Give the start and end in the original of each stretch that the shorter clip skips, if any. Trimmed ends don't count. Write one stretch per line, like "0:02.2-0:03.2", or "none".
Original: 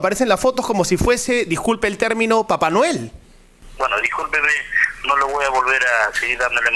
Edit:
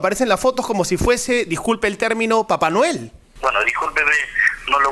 0:03.2-0:03.6